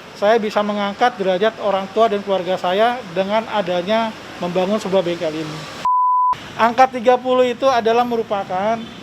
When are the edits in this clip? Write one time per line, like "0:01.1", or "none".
0:06.0